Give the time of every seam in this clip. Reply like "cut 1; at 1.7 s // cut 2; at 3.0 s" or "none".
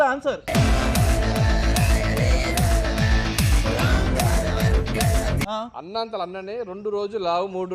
cut 1; at 5.5 s